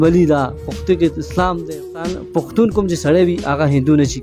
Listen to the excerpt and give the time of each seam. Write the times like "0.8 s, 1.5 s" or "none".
2.2 s